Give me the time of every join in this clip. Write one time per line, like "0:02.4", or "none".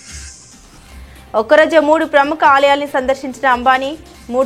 0:01.1